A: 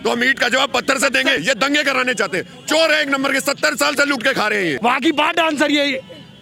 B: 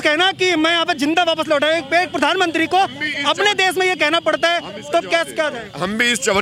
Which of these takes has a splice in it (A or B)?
A